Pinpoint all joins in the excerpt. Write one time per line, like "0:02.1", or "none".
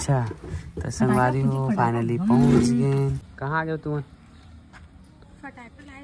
0:03.3